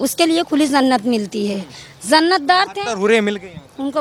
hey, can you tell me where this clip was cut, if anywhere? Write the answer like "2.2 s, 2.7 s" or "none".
none

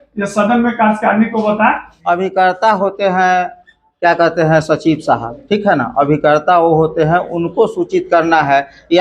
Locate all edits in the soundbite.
1.9 s

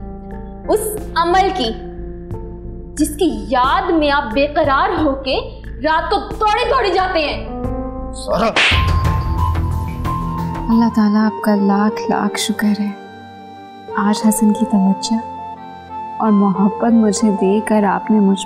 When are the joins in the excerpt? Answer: 10.6 s

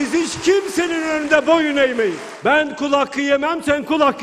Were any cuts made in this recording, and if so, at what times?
2.3 s

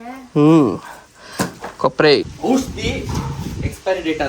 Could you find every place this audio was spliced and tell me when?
2.3 s

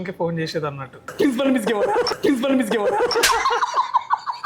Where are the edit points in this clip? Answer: 1.1 s, 3.2 s

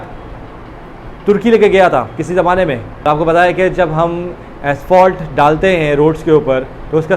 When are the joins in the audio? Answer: 3.0 s

